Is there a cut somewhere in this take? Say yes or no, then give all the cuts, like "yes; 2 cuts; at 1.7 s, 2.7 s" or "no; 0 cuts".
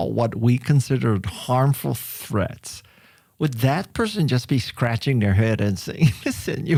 no; 0 cuts